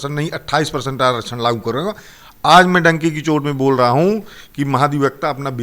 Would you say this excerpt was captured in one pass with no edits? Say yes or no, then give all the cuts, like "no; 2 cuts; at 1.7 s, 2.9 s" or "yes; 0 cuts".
yes; 0 cuts